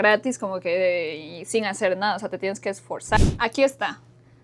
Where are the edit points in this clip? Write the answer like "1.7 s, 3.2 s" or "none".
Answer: 3.3 s

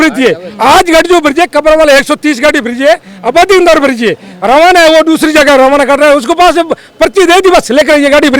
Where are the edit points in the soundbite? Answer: none

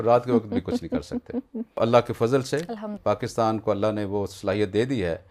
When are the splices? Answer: 1.8 s

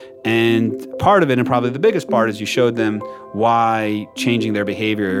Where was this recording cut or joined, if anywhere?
none

